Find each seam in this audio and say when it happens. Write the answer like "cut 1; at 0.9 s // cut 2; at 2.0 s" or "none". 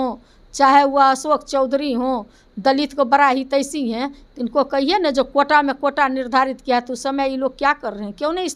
none